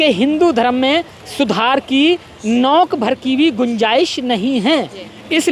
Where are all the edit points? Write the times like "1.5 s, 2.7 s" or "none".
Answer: none